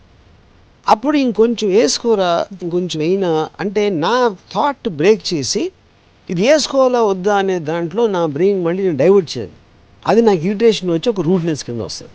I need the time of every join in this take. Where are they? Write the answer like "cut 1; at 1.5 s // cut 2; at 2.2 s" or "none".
none

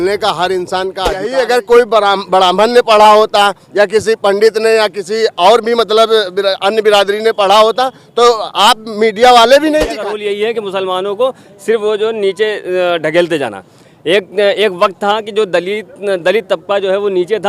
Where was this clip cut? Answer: cut 1; at 1.3 s // cut 2; at 10.1 s

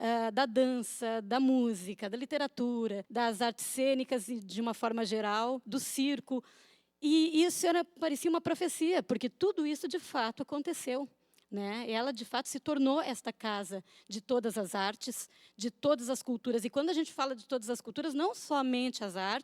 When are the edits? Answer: cut 1; at 3.0 s

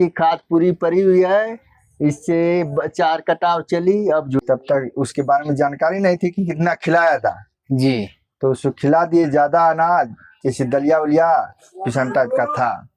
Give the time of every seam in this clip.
cut 1; at 4.4 s

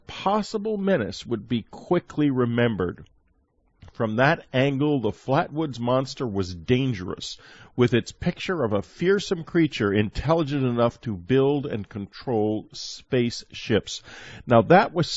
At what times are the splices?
none

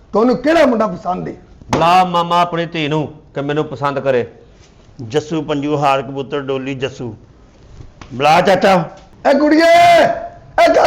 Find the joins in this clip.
none

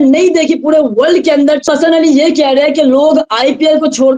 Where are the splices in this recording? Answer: cut 1; at 1.7 s

